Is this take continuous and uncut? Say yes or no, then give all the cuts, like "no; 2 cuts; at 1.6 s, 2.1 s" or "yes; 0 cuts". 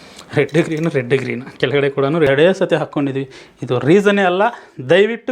no; 1 cut; at 2.3 s